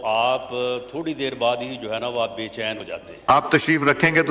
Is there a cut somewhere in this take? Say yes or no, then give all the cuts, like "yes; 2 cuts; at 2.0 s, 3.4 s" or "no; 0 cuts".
yes; 1 cut; at 3.3 s